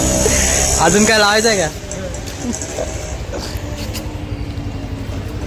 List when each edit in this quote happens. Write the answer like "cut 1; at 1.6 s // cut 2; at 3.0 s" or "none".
cut 1; at 2.5 s